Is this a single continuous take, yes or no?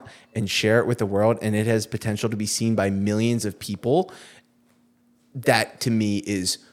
yes